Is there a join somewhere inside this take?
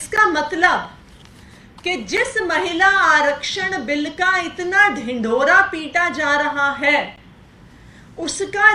no; 0 cuts

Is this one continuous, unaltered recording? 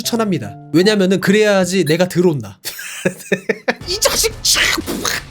no; 1 cut; at 3.8 s

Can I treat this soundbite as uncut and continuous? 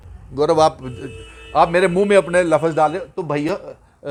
yes; 0 cuts

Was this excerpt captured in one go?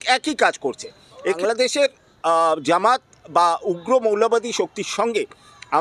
no; 1 cut; at 1.4 s

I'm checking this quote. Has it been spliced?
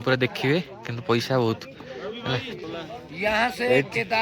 yes; 1 cut; at 2.6 s

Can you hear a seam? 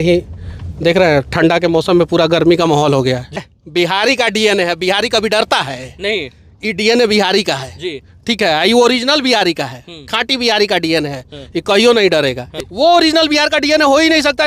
yes; 2 cuts; at 3.4 s, 12.5 s

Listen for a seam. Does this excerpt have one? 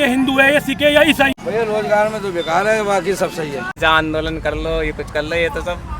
yes; 1 cut; at 3.7 s

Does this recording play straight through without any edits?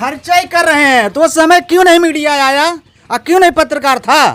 yes; 0 cuts

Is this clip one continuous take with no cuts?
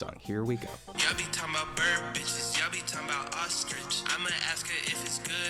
no; 1 cut; at 0.9 s

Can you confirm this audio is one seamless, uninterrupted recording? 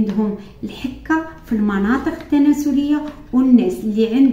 yes; 0 cuts

